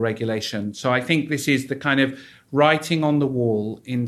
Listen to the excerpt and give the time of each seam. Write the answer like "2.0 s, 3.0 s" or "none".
none

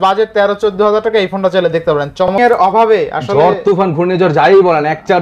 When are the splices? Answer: 2.3 s

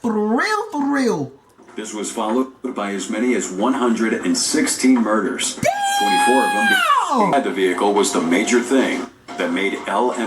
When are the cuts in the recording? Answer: 7.3 s

